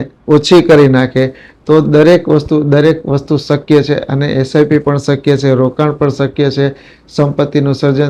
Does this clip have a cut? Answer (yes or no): no